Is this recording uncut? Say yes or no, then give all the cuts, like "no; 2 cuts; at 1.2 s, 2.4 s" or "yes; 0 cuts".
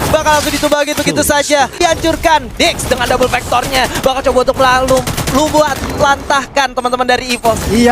no; 1 cut; at 1.8 s